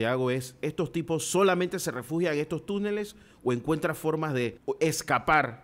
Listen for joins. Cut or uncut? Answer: cut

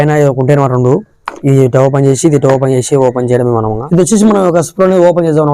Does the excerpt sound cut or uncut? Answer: cut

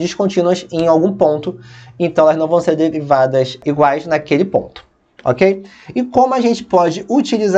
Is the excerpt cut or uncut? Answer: cut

